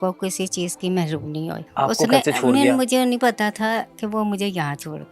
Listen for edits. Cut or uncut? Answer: cut